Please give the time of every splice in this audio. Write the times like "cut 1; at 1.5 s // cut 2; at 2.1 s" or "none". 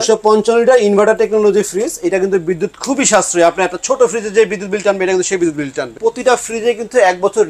cut 1; at 5.9 s

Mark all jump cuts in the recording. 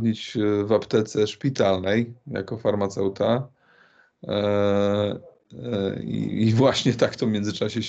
none

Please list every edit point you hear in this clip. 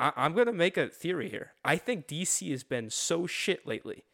none

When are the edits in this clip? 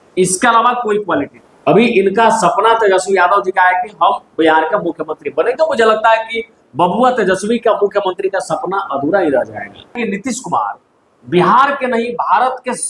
cut 1; at 1.4 s // cut 2; at 10.0 s

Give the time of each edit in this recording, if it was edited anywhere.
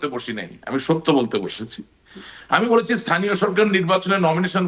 none

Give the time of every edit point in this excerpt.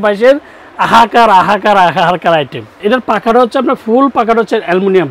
cut 1; at 2.8 s

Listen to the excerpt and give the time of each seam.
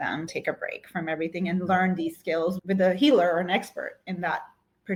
none

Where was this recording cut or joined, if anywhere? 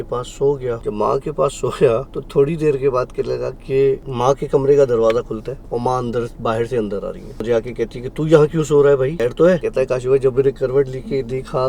cut 1; at 0.8 s // cut 2; at 2.2 s // cut 3; at 4.1 s // cut 4; at 5.6 s // cut 5; at 7.4 s // cut 6; at 9.5 s

